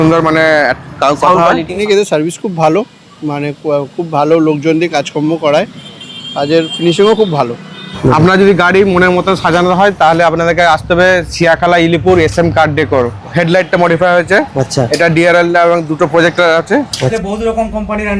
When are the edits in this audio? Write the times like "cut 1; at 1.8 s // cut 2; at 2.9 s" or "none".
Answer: cut 1; at 1.8 s // cut 2; at 8.0 s // cut 3; at 13.1 s // cut 4; at 17.1 s